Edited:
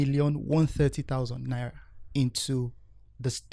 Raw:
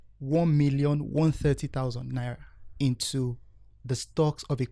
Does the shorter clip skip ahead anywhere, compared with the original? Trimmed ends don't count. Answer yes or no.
no